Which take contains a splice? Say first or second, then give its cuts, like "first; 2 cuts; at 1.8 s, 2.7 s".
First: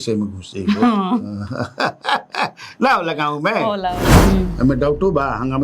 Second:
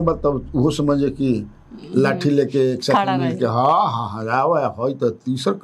first; 1 cut; at 4.1 s